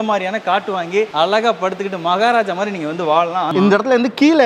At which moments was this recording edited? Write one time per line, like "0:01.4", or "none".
0:01.1
0:03.5